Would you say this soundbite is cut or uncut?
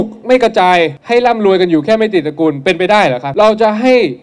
cut